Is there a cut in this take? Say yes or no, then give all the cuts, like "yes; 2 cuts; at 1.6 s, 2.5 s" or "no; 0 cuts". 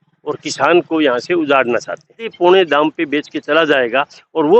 yes; 1 cut; at 2.3 s